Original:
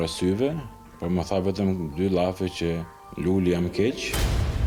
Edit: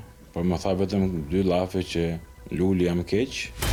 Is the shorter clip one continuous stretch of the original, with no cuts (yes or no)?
yes